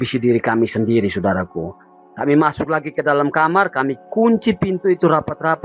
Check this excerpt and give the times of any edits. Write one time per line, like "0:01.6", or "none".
none

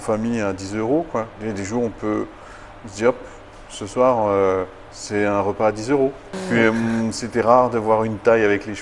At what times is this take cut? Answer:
0:06.3

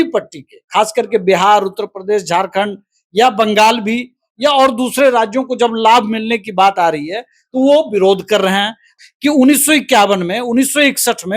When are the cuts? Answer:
0:08.8

